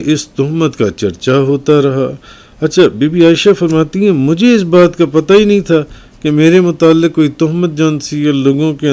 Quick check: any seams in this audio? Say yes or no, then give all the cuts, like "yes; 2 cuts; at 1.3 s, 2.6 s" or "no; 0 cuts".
no; 0 cuts